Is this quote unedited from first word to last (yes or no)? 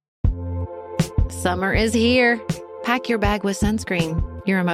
no